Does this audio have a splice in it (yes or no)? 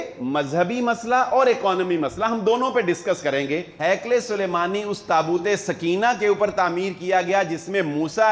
yes